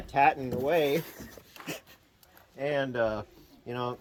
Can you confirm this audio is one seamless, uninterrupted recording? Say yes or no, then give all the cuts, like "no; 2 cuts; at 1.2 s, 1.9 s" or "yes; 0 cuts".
yes; 0 cuts